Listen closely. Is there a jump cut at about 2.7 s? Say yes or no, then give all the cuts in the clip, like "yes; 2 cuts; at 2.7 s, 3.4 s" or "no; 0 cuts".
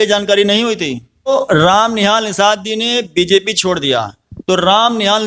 no; 1 cut; at 1.3 s